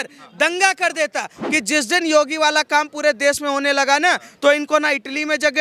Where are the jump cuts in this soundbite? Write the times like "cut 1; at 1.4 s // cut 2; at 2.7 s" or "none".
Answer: cut 1; at 1.4 s